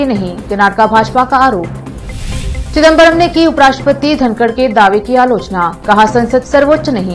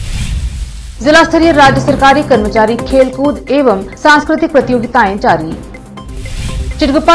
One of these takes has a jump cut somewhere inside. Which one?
second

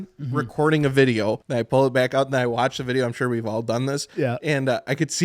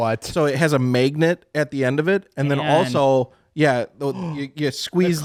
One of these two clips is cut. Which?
first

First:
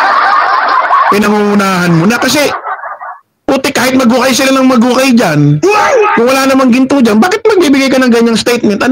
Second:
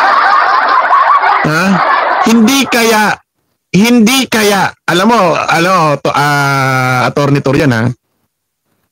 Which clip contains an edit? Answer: first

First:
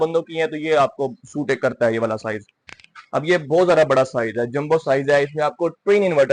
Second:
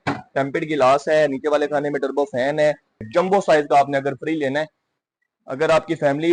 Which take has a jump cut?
second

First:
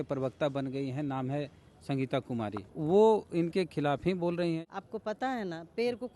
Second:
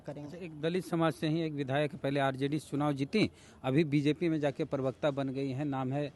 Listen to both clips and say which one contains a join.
first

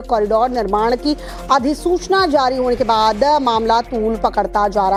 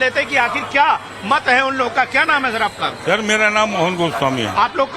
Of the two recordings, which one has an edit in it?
second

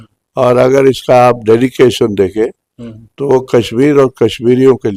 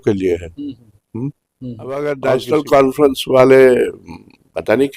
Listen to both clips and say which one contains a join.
second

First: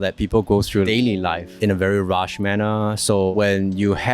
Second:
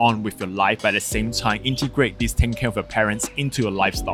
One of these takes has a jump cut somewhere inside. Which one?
first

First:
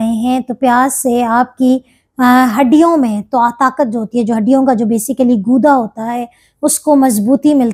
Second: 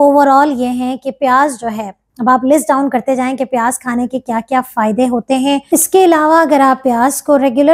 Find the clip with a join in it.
second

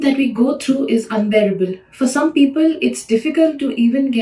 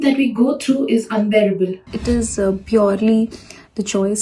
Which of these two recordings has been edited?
second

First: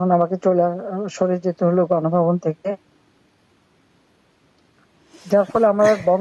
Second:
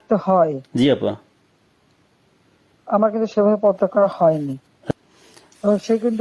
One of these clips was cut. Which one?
second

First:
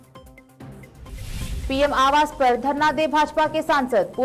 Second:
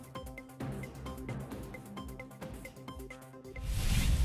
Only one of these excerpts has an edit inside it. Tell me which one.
first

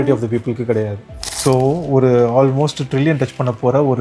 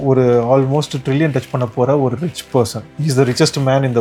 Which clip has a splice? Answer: first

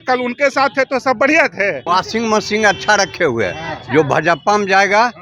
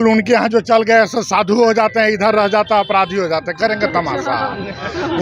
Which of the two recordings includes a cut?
first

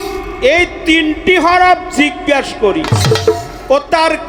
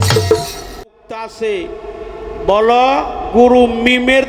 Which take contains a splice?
second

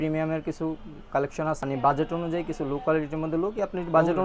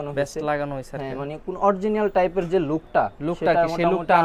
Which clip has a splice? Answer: first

